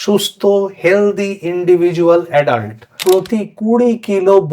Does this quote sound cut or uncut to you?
cut